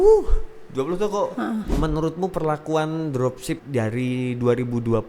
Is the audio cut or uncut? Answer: cut